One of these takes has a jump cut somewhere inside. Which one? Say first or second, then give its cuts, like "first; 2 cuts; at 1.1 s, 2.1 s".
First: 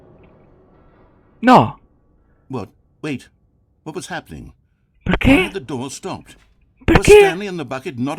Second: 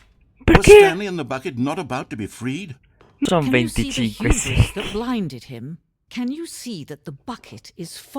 second; 1 cut; at 3.3 s